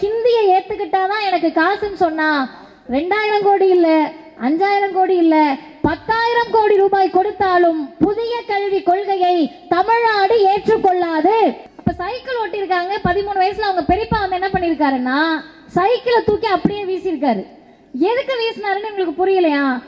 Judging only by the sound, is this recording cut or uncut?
cut